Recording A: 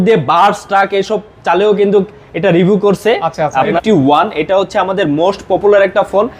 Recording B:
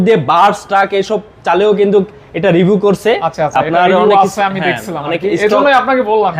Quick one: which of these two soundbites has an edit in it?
A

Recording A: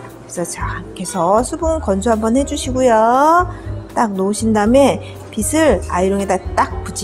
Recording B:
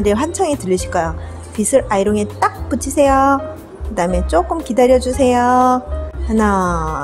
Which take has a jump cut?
B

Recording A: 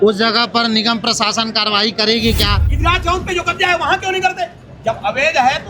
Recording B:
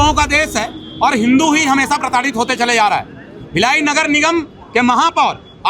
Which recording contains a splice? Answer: A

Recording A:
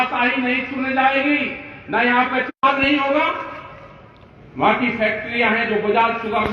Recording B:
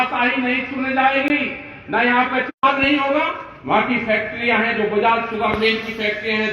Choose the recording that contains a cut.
B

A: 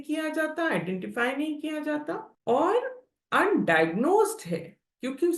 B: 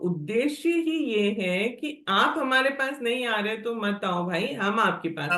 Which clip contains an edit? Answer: A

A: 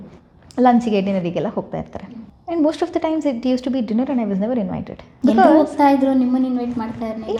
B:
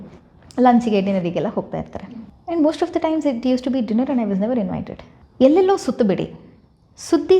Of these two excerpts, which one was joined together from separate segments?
B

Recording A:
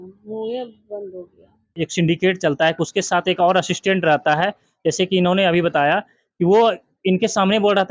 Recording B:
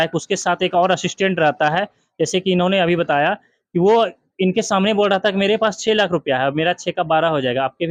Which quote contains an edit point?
A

